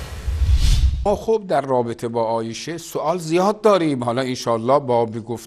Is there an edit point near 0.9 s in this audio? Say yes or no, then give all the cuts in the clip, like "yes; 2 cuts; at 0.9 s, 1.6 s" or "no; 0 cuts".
yes; 1 cut; at 0.9 s